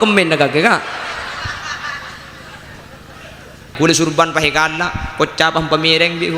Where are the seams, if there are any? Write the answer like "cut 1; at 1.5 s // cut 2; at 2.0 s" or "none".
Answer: cut 1; at 3.7 s